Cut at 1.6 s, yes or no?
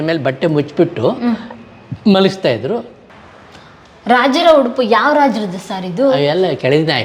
no